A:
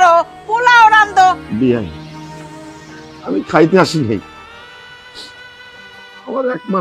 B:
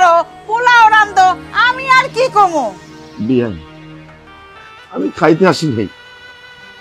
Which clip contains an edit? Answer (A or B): A